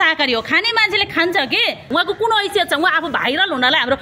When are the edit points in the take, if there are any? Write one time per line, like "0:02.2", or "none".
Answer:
0:01.9